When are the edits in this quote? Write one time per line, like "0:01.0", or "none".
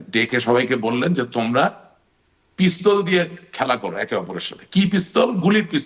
none